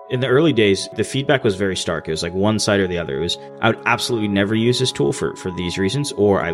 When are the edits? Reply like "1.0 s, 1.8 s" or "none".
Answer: 0.9 s